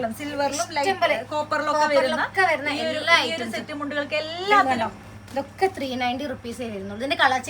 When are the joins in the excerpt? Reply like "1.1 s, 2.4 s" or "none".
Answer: 4.7 s